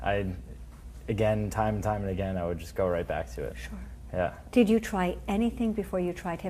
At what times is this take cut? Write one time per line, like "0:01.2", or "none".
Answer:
0:05.5